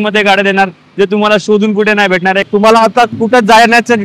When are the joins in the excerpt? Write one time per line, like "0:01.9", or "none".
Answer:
0:02.5